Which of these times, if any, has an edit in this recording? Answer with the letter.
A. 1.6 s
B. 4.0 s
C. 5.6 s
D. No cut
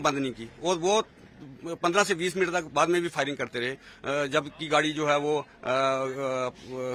D